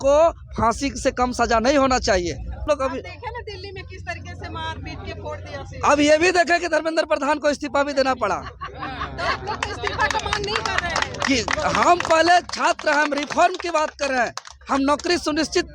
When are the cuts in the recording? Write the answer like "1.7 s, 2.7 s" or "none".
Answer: 2.6 s